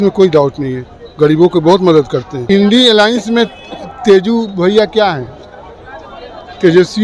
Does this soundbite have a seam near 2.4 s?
yes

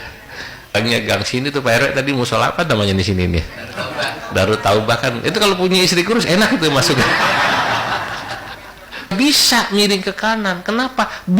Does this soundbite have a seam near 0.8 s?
yes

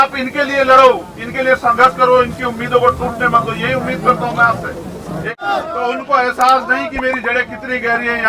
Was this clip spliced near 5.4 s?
yes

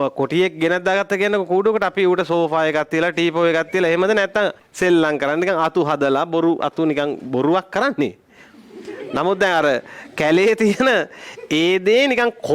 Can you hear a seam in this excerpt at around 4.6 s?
yes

